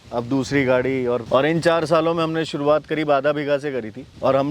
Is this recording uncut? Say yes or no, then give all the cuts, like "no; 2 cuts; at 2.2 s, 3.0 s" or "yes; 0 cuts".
no; 1 cut; at 1.2 s